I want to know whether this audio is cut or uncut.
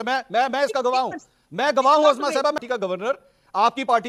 cut